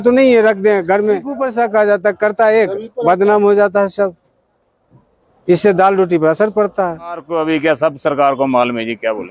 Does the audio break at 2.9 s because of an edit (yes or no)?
no